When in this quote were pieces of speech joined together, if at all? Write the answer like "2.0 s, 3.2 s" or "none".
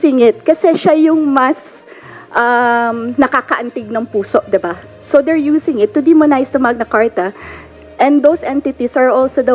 none